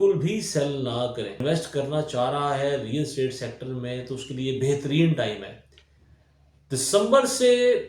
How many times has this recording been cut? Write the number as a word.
one